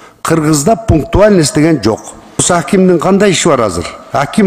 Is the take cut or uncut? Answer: cut